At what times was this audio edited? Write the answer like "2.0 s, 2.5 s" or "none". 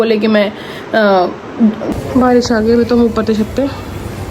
1.9 s